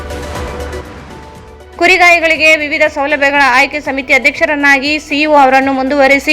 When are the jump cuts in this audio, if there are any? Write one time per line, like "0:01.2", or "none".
0:01.4